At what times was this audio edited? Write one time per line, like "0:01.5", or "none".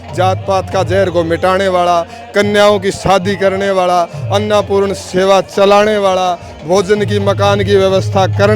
none

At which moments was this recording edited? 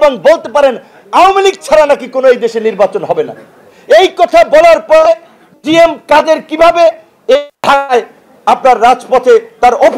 none

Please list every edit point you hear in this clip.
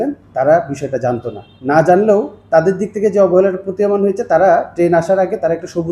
none

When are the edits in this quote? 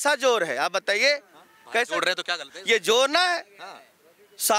none

